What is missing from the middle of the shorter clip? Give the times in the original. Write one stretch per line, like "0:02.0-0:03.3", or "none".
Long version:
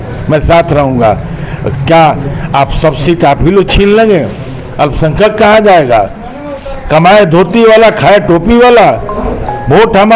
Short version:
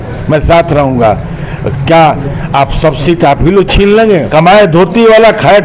0:04.3-0:06.8